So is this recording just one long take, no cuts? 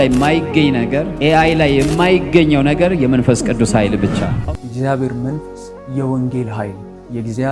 no; 1 cut; at 4.3 s

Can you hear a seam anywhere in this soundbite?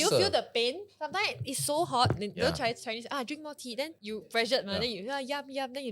yes; 1 cut; at 4.0 s

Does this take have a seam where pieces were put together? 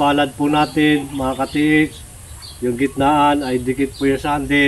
no; 0 cuts

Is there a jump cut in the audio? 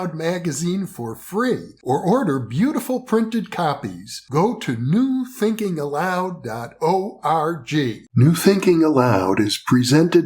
yes; 1 cut; at 8.0 s

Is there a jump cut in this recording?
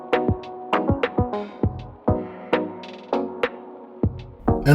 no; 0 cuts

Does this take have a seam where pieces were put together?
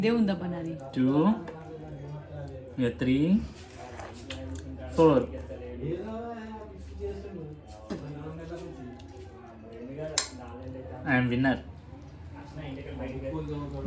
no; 0 cuts

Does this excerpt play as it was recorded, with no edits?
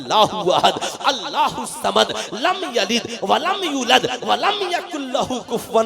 yes; 0 cuts

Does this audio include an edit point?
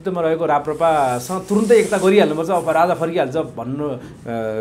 no; 0 cuts

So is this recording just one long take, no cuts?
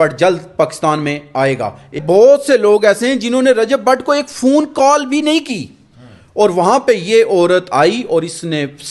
no; 1 cut; at 2.0 s

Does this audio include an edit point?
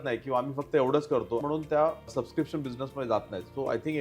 yes; 2 cuts; at 1.4 s, 2.1 s

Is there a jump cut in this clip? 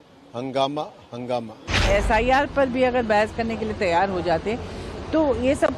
yes; 1 cut; at 1.9 s

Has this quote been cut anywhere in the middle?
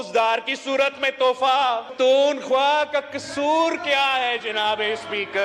yes; 1 cut; at 1.9 s

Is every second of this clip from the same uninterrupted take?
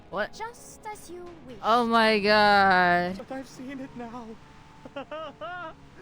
no; 1 cut; at 3.2 s

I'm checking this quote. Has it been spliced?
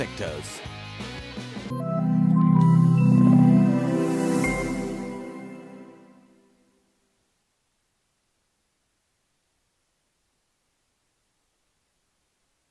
no; 0 cuts

